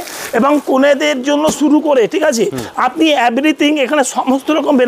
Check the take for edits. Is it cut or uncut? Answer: uncut